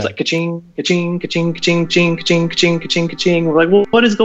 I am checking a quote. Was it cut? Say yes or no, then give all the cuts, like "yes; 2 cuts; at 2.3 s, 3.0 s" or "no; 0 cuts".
no; 0 cuts